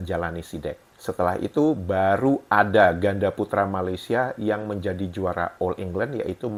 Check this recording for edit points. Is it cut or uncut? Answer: uncut